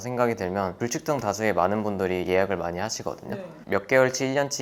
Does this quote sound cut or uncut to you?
cut